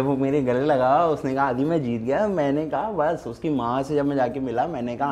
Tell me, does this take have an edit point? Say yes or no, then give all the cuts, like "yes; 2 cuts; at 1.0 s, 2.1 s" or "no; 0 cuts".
no; 0 cuts